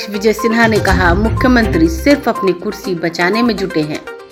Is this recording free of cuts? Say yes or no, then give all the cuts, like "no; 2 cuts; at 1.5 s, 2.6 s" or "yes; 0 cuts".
yes; 0 cuts